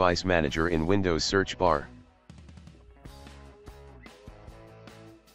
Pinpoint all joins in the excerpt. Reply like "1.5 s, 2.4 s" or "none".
1.8 s

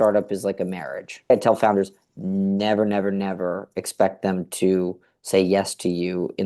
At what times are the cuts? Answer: 1.3 s

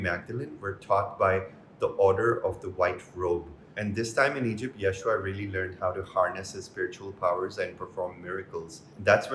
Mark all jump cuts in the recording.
3.6 s

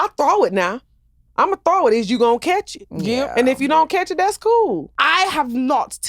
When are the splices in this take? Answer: 4.9 s

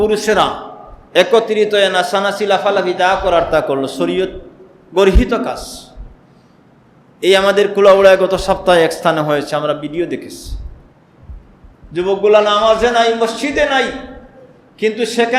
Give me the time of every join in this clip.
none

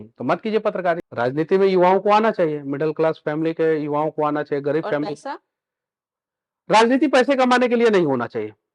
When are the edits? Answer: 1.1 s

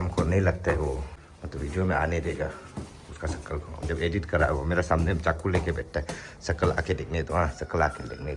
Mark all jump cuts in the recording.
1.1 s

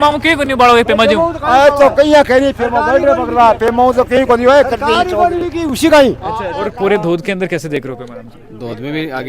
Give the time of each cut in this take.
6.6 s

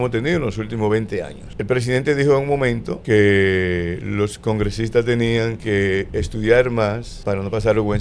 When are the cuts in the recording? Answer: 1.4 s, 2.9 s, 5.6 s, 7.1 s

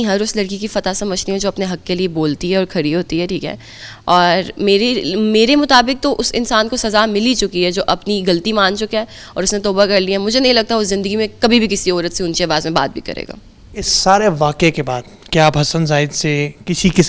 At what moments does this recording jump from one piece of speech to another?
none

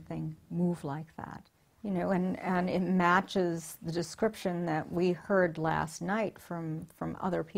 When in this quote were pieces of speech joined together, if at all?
1.4 s

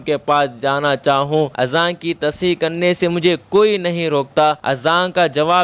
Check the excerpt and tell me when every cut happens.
1.5 s, 4.6 s

